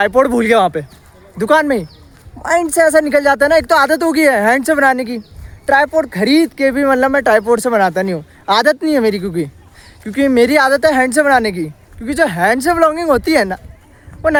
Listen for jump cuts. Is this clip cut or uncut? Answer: uncut